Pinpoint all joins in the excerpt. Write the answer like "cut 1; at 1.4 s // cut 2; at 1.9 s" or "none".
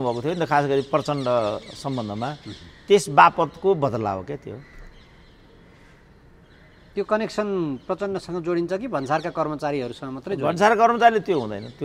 none